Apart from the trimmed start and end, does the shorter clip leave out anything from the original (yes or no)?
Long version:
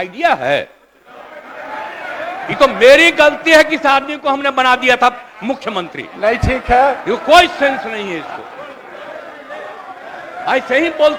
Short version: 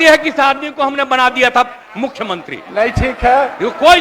no